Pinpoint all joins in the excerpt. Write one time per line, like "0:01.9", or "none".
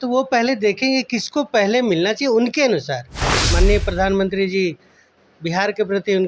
0:03.5